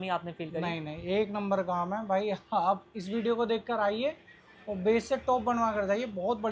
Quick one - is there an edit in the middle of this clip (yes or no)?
no